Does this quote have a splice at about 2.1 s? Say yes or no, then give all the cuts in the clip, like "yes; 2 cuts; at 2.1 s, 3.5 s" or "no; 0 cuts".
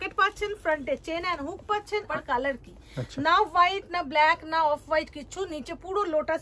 yes; 1 cut; at 2.1 s